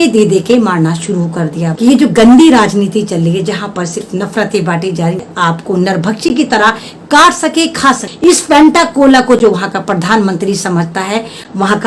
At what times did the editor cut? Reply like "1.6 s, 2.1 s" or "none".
1.7 s, 5.2 s, 8.1 s